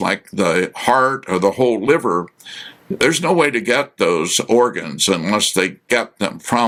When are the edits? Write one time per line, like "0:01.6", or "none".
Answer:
none

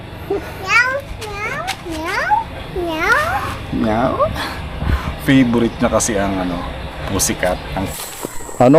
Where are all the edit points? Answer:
0:07.8

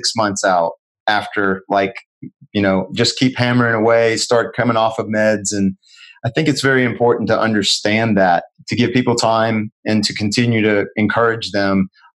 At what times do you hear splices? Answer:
0:08.5

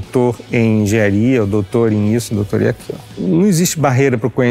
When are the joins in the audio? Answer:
0:03.1

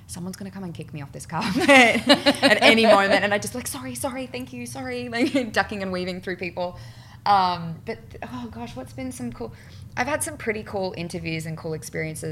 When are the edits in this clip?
none

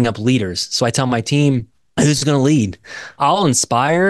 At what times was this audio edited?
0:03.2

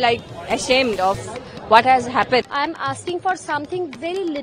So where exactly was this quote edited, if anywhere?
0:02.5

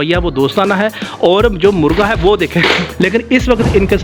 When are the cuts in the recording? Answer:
0:02.9

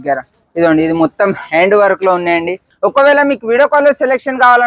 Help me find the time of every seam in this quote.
0:02.7

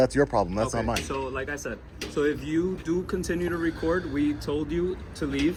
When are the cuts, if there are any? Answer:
none

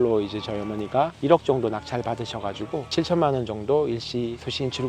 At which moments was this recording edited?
0:02.9

